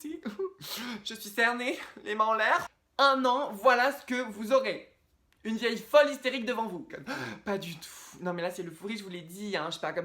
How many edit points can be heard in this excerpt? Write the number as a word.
two